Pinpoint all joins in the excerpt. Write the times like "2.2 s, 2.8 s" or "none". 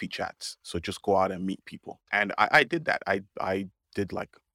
2.0 s